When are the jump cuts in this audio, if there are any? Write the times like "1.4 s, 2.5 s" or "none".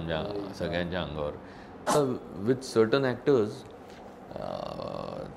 2.0 s